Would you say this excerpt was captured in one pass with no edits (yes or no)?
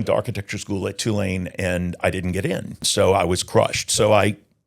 no